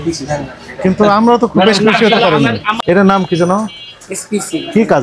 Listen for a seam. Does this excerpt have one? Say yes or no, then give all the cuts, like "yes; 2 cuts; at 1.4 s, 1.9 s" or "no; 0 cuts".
yes; 1 cut; at 2.7 s